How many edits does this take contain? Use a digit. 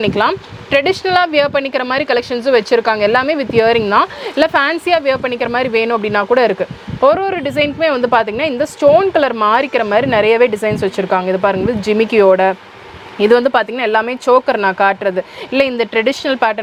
0